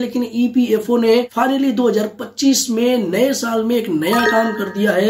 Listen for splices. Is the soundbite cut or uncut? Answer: cut